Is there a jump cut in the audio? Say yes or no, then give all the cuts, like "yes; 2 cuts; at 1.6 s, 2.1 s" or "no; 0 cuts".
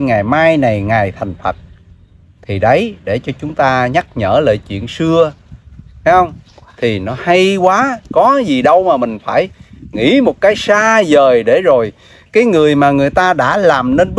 no; 0 cuts